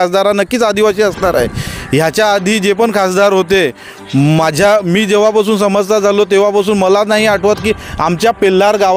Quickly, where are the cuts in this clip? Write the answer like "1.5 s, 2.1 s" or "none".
none